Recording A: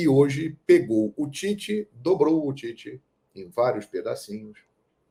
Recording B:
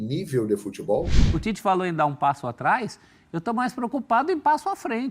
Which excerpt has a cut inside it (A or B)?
B